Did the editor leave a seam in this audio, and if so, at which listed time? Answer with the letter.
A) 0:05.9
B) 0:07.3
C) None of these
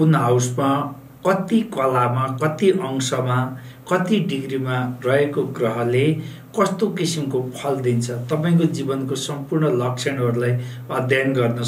C